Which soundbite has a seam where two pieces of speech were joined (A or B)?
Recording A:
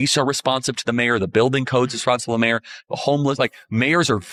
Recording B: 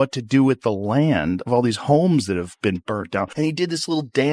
B